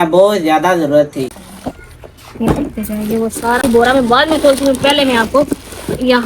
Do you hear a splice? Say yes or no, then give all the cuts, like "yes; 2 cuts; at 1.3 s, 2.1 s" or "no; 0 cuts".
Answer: yes; 2 cuts; at 1.4 s, 3.6 s